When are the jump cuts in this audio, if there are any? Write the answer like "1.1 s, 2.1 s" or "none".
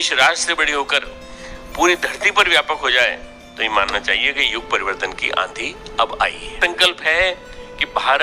6.6 s